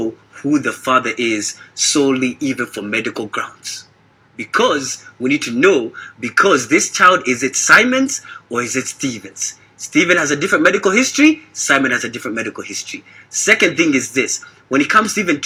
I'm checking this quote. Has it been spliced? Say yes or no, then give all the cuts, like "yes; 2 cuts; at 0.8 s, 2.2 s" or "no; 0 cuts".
no; 0 cuts